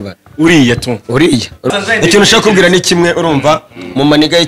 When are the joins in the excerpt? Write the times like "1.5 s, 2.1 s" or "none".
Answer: 1.7 s